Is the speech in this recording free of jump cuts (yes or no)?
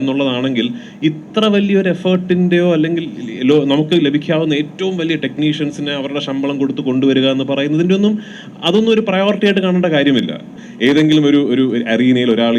no